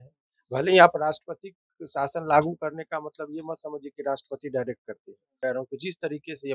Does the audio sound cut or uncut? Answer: cut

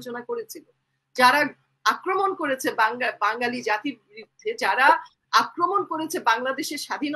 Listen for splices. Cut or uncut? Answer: uncut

